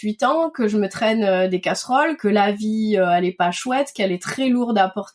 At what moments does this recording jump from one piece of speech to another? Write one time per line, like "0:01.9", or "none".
0:02.2